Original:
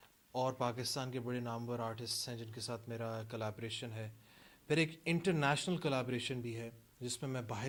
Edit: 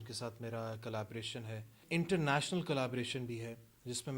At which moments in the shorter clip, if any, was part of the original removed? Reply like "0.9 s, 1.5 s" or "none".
1.8 s